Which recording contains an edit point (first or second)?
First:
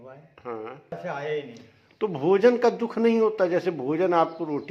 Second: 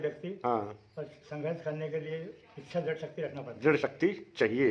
first